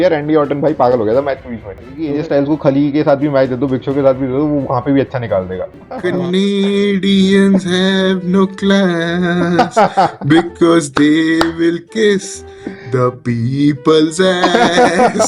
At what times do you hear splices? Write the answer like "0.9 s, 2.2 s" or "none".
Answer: 2.0 s, 6.0 s

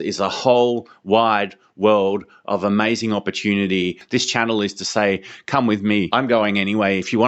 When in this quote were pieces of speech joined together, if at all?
4.0 s, 6.1 s

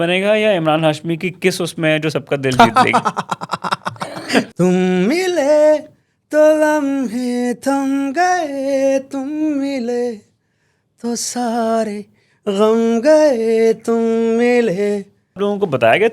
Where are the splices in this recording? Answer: 4.5 s, 15.4 s

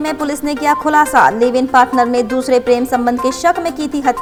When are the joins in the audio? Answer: none

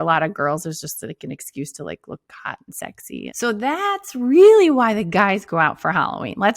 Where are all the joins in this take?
3.3 s

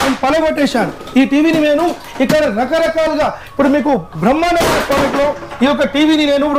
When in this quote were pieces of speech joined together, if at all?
none

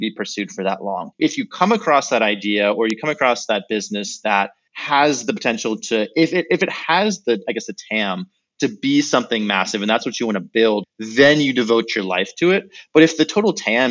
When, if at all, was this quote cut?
1.2 s, 11.0 s

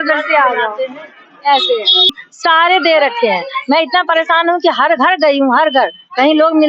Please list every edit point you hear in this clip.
2.2 s

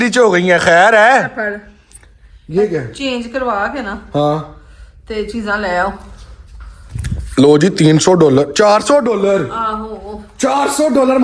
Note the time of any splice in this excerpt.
none

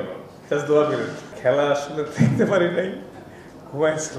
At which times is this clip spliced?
1.2 s

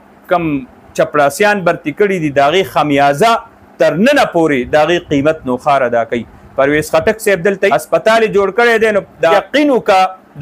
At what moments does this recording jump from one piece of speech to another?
7.7 s, 9.3 s

